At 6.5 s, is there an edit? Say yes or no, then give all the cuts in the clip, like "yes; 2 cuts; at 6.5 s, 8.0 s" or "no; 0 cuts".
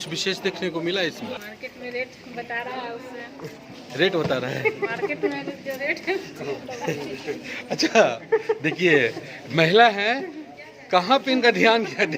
no; 1 cut; at 1.4 s